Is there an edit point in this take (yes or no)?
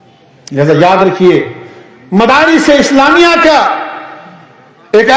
no